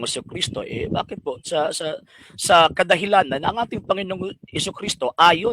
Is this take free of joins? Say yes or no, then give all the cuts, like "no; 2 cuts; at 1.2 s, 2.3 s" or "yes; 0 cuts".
yes; 0 cuts